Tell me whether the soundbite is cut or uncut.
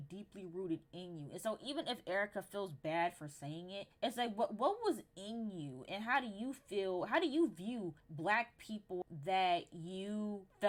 uncut